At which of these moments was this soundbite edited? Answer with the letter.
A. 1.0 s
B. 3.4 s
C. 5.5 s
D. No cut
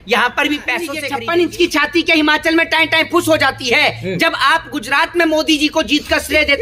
A